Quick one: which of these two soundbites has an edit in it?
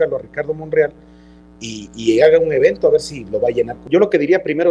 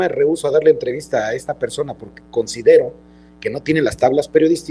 first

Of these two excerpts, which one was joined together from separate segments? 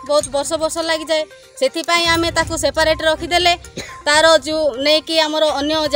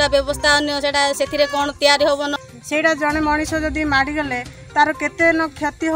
second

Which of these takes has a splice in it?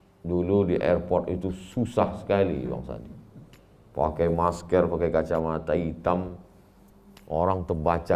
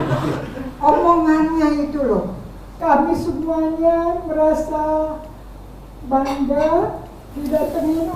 second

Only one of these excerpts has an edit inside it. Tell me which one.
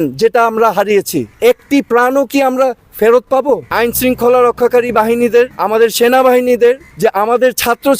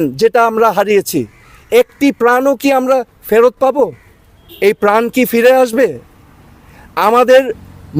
first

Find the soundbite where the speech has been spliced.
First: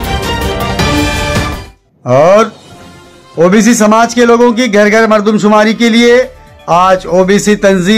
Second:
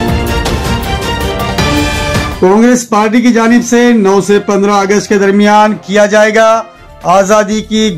first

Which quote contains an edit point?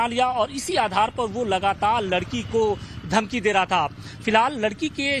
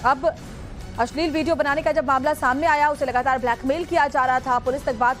first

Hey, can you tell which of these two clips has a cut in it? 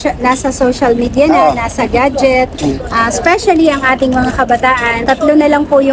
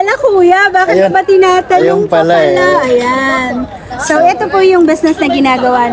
first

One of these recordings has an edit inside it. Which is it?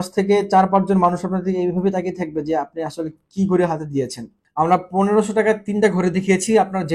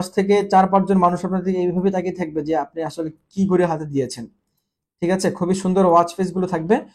first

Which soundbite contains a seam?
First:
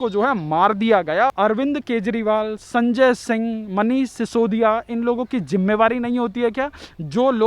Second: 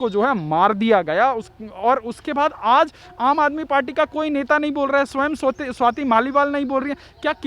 first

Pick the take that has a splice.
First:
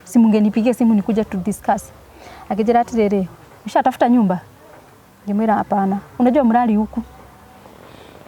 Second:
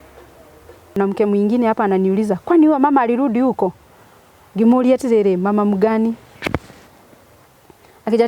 second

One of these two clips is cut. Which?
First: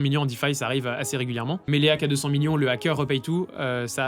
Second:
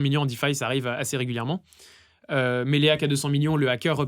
first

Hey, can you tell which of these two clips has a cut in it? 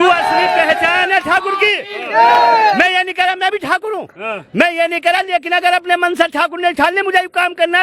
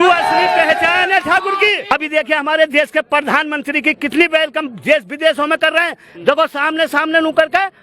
second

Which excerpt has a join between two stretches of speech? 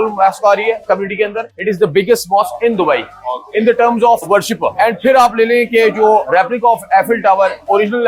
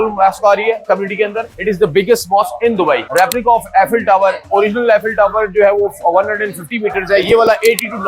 second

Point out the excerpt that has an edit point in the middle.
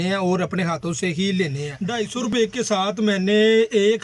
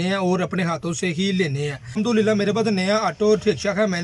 first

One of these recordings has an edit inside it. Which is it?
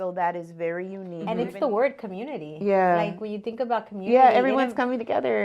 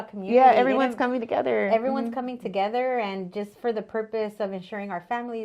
first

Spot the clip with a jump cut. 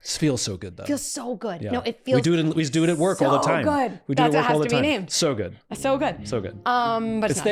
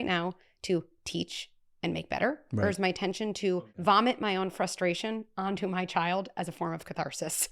second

